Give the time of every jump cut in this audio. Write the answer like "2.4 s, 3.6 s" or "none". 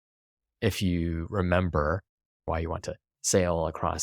2.3 s